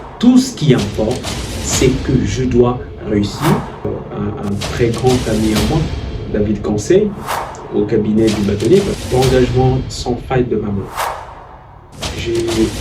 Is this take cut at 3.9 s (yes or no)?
yes